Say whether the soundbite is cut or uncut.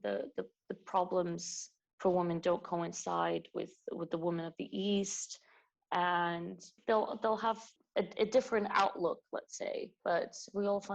cut